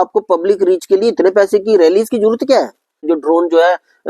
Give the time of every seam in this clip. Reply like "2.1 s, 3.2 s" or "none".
3.1 s